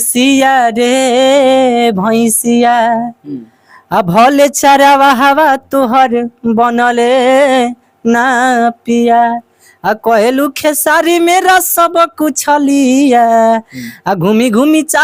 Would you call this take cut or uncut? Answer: uncut